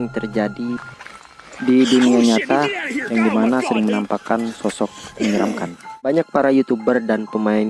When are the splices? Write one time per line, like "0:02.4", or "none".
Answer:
0:05.9